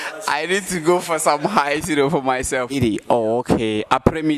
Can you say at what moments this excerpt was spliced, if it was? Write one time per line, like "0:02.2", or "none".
0:02.7

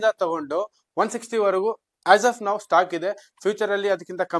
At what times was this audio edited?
none

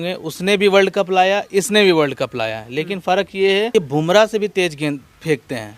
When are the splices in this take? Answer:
0:03.7

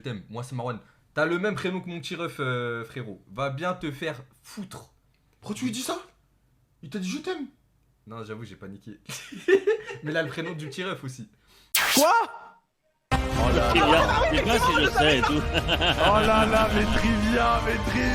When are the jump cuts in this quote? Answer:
0:11.8

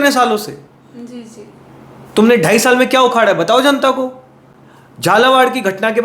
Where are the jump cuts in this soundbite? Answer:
none

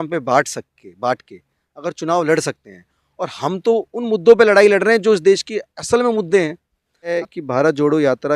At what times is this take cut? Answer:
0:07.1

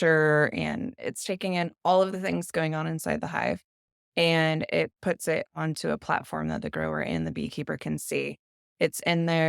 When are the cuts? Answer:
0:01.0

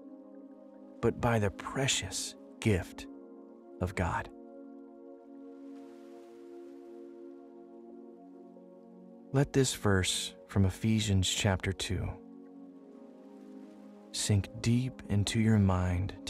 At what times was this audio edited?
0:04.3
0:09.3
0:12.3
0:13.8

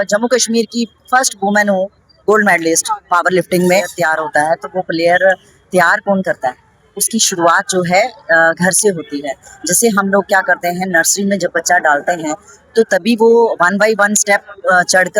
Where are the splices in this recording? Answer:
0:04.0

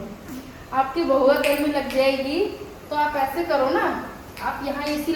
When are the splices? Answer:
none

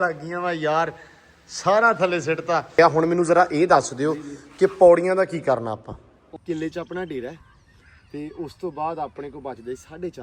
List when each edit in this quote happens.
0:02.7
0:06.2

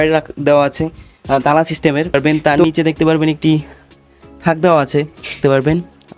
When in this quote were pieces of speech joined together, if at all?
0:02.1
0:05.4

